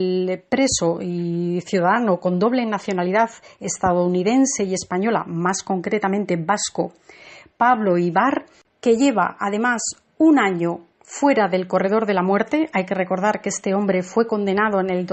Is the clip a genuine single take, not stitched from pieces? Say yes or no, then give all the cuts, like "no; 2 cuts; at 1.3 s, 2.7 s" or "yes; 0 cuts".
yes; 0 cuts